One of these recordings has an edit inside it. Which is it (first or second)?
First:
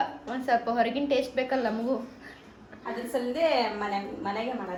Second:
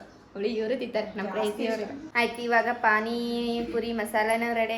second